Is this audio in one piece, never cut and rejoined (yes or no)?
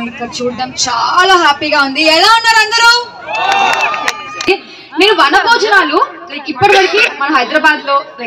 no